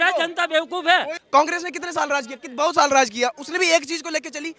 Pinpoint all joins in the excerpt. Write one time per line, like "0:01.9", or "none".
0:01.2

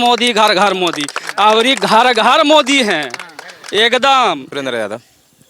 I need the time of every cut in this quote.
0:04.5

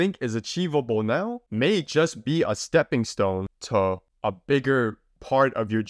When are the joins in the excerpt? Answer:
0:01.4
0:03.6
0:04.1

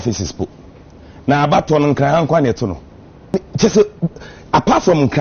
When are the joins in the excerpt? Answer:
0:03.3

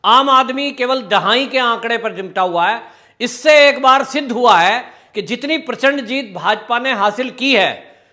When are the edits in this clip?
none

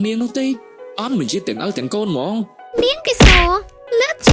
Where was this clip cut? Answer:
0:02.6

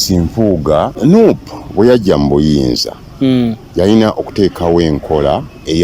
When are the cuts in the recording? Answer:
0:00.9

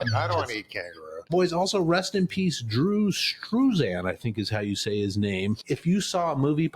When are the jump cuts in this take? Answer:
0:01.3
0:05.6

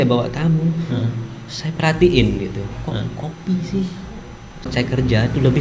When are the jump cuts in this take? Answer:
0:04.7

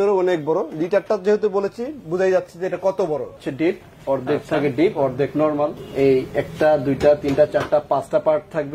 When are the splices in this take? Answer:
0:03.4
0:05.8

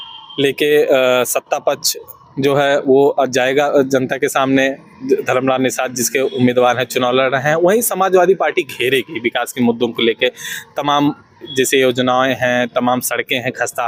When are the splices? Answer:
none

